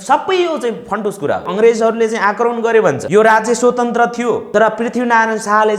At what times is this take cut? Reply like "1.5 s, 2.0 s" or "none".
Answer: 1.5 s, 3.0 s, 4.5 s